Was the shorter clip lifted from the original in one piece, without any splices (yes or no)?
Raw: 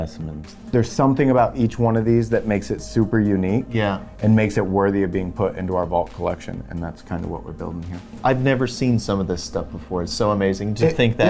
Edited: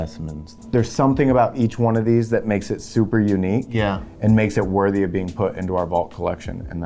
yes